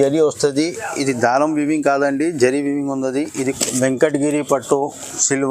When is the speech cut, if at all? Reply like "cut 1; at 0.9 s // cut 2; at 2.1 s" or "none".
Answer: cut 1; at 3.6 s